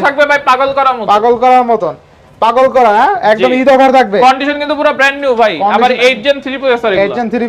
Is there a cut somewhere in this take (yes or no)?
no